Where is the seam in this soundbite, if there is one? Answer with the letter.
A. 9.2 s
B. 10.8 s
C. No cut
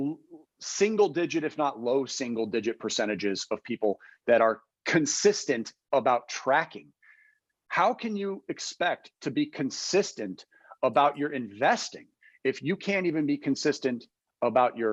C